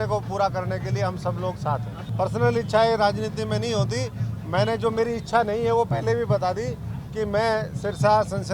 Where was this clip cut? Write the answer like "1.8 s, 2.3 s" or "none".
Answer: 2.0 s